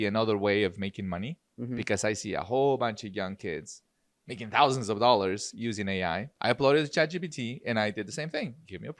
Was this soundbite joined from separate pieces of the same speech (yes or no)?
yes